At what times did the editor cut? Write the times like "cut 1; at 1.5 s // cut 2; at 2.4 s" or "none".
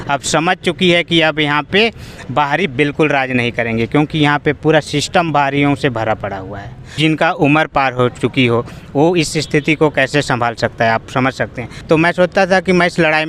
cut 1; at 7.0 s // cut 2; at 11.7 s

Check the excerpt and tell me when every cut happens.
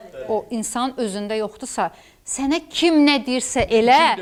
none

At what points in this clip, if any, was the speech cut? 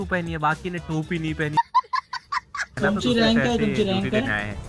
cut 1; at 2.8 s

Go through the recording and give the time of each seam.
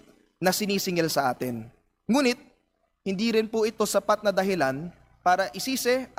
none

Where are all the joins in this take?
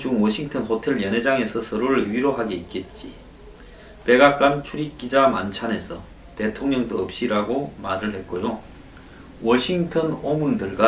none

